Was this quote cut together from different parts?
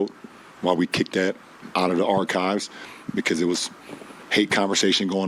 yes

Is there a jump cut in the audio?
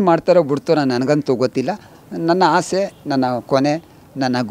no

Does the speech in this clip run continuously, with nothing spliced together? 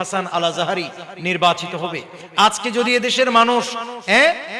yes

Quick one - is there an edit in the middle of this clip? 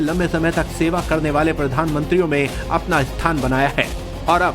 yes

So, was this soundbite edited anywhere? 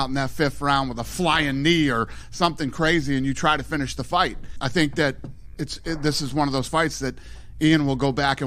no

